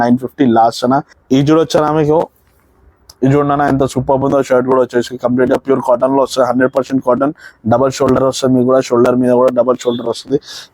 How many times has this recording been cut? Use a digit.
1